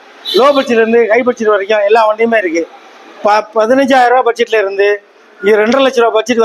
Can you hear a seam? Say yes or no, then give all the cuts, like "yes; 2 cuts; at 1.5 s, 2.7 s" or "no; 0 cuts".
no; 0 cuts